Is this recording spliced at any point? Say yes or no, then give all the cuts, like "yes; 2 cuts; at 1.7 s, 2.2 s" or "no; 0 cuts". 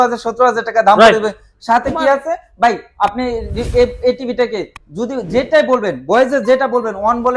no; 0 cuts